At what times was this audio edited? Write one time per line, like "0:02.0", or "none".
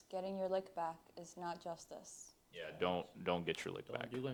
none

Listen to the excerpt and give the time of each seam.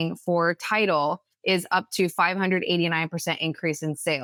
none

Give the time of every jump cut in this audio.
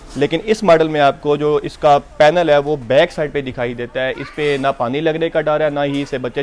none

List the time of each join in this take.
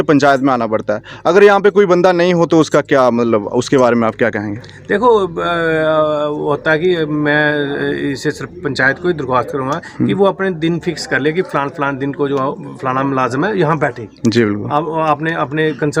none

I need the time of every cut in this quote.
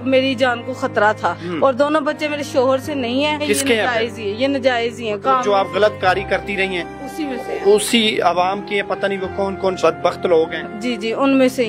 0:01.4
0:03.4
0:09.8

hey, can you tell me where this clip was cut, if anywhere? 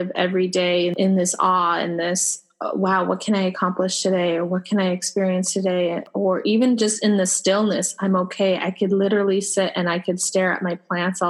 0:00.9
0:06.1

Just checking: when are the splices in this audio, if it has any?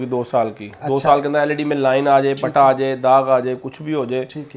none

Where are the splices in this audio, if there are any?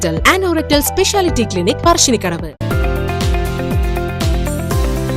0:02.5

